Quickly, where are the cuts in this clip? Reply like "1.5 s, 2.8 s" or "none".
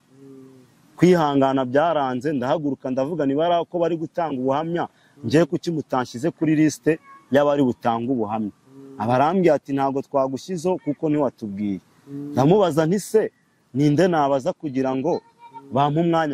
none